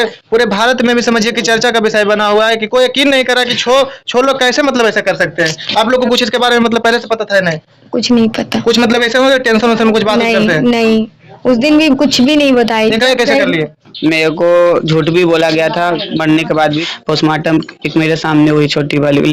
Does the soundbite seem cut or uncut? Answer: cut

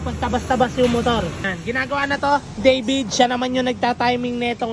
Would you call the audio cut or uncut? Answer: uncut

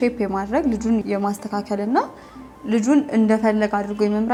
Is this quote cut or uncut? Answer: uncut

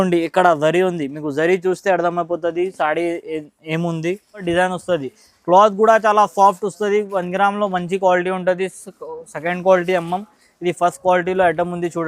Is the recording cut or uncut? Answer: cut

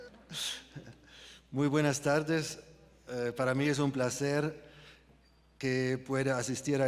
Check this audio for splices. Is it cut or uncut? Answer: uncut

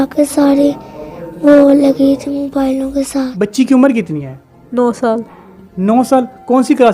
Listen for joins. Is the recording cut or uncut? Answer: cut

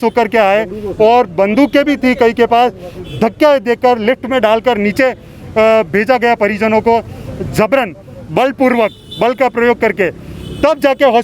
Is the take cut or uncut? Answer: uncut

